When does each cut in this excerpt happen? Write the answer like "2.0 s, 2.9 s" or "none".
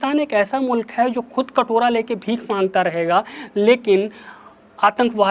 none